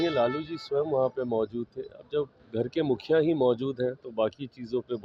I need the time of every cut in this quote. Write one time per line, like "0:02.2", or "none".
none